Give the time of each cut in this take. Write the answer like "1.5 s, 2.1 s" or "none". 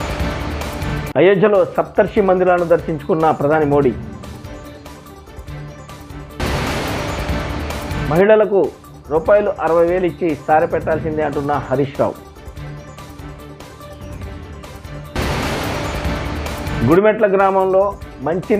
0.9 s